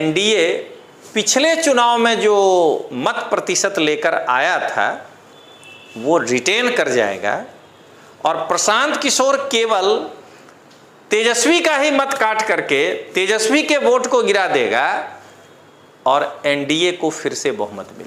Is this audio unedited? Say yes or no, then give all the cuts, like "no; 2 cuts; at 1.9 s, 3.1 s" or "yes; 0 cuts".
yes; 0 cuts